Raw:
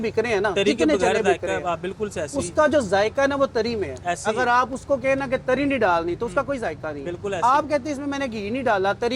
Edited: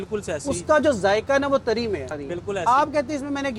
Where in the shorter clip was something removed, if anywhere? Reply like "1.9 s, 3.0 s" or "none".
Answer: 2.1 s